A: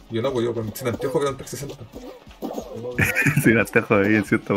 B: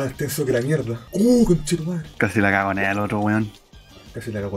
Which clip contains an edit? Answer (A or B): B